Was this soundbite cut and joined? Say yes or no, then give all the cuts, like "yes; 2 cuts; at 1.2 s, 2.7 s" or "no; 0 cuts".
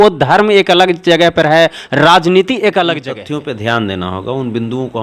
yes; 1 cut; at 3.1 s